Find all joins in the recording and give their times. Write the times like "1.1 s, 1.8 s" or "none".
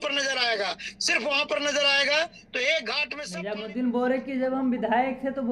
3.1 s